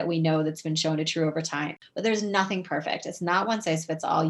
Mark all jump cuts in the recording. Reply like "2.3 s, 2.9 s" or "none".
1.8 s